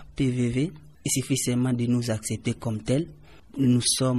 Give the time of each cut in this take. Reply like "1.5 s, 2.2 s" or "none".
none